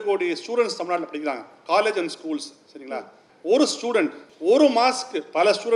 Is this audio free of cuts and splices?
no; 2 cuts; at 3.2 s, 4.3 s

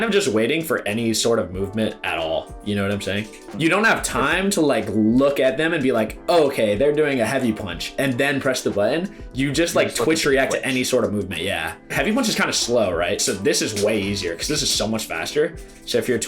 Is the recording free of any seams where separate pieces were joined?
no; 2 cuts; at 3.4 s, 11.9 s

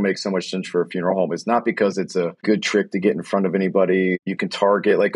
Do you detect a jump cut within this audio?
yes; 2 cuts; at 2.4 s, 4.2 s

